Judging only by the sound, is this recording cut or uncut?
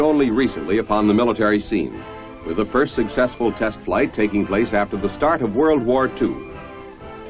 uncut